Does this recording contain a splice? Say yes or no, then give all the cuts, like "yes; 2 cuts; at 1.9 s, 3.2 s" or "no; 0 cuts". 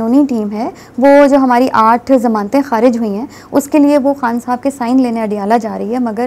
no; 0 cuts